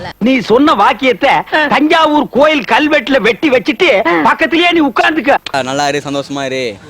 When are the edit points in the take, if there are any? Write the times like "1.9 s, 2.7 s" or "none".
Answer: 5.4 s